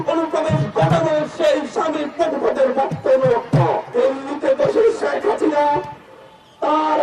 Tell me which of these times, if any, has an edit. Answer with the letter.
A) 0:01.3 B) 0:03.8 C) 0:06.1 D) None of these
B